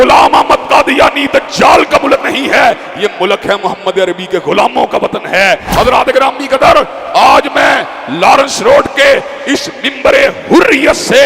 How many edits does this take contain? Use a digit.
1